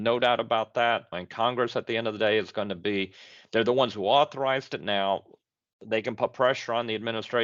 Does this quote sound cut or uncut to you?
cut